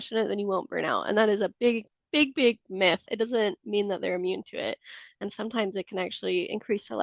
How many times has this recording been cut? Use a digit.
1